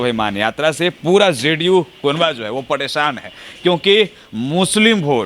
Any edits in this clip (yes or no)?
no